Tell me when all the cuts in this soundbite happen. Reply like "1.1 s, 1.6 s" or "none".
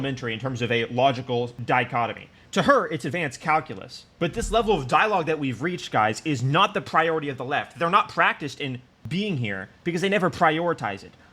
4.0 s